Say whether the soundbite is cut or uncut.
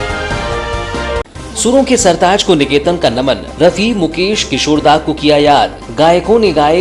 cut